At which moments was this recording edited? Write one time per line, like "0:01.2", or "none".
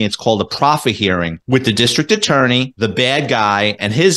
0:01.4
0:02.7